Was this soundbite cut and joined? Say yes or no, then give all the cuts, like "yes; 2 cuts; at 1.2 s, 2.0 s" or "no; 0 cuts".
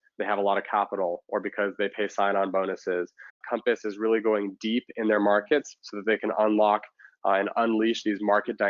yes; 1 cut; at 3.4 s